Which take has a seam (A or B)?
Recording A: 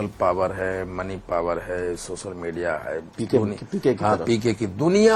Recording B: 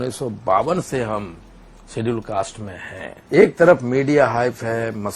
B